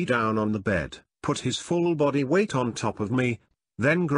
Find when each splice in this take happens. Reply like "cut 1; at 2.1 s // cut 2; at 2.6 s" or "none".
cut 1; at 1.4 s